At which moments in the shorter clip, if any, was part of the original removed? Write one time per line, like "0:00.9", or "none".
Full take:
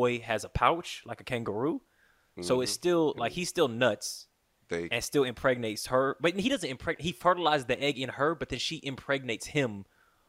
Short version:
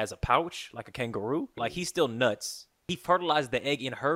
0:01.6
0:02.9